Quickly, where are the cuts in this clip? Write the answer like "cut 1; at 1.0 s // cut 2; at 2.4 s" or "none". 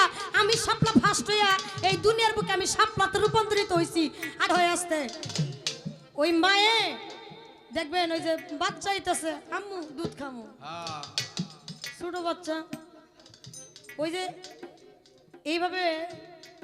cut 1; at 4.4 s